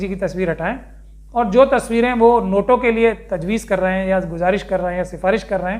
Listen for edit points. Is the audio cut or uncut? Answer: uncut